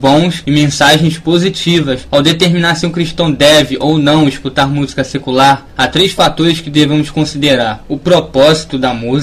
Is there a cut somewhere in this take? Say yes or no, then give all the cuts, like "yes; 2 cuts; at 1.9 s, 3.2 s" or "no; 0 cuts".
yes; 1 cut; at 5.5 s